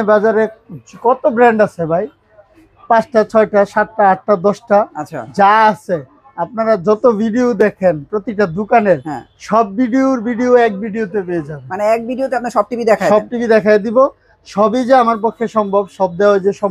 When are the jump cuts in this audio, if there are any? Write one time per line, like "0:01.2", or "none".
none